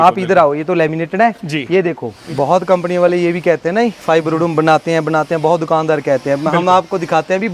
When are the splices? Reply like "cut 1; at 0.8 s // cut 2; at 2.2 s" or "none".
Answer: cut 1; at 2.1 s